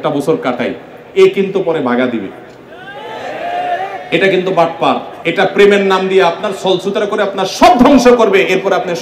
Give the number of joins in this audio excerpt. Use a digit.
1